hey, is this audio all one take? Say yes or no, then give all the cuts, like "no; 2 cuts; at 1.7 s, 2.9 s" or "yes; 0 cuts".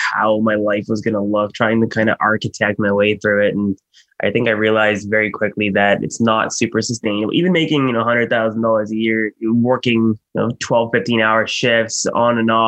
yes; 0 cuts